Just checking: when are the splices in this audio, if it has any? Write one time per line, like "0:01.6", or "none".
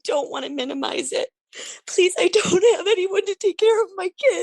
0:01.5